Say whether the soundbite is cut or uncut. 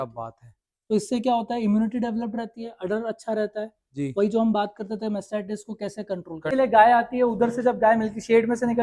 cut